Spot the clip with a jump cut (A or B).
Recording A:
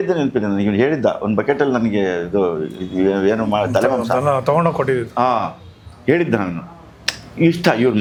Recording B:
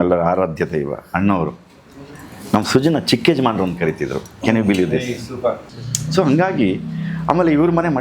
B